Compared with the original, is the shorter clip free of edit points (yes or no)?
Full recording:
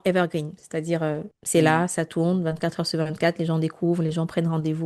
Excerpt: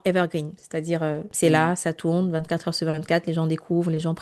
no